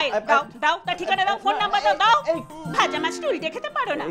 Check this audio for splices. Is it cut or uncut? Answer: cut